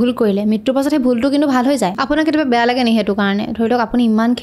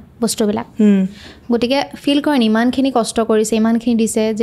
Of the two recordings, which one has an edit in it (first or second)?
first